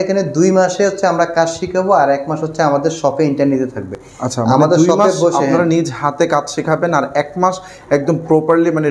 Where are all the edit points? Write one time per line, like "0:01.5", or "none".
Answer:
none